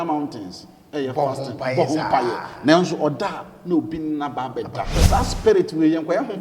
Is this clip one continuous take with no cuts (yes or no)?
no